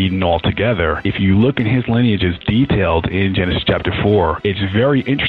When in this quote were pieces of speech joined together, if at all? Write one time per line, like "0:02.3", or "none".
0:01.0
0:04.4